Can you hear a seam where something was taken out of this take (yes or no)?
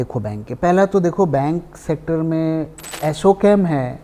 yes